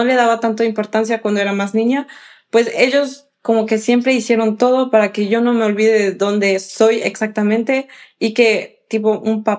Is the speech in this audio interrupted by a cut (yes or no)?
no